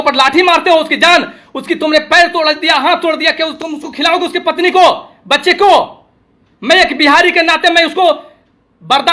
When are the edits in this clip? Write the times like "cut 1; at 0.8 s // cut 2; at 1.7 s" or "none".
none

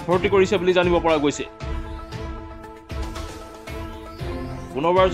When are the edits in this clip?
none

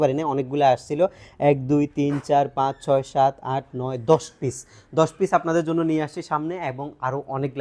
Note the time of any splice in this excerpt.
none

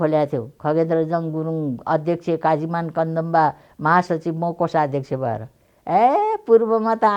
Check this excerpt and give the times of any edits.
none

